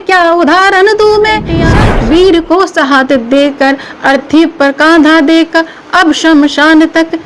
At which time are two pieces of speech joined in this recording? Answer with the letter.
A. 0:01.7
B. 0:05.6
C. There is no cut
A